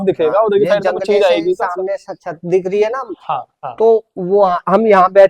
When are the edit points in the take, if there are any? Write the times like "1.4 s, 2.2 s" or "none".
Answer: 3.5 s